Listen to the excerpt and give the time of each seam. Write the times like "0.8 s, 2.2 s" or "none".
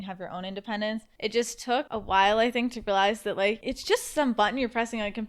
1.1 s, 1.9 s, 3.7 s

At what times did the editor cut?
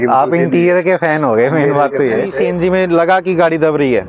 2.4 s

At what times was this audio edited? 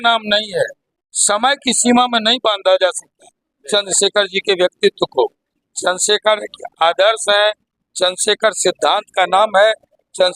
5.5 s

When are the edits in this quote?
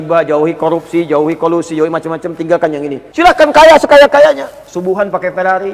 3.0 s

